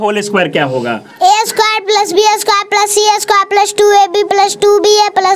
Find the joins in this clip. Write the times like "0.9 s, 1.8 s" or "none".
none